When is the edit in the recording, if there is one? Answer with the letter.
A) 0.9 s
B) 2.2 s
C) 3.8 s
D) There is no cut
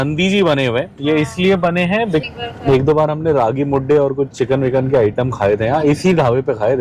B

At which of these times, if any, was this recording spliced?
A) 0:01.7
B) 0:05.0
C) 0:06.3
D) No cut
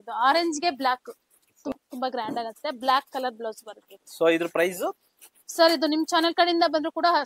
A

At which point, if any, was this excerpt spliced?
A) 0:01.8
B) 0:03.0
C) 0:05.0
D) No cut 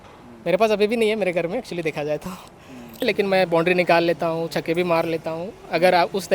B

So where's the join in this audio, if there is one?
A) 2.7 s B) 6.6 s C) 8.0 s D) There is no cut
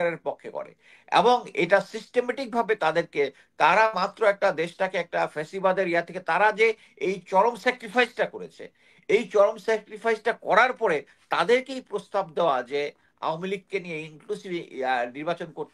D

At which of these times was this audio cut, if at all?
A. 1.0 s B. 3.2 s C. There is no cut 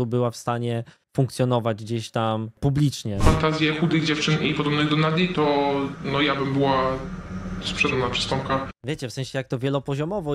B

